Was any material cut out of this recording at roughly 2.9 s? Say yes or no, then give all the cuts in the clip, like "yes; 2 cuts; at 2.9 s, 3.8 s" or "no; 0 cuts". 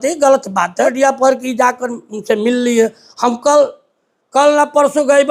no; 1 cut; at 0.9 s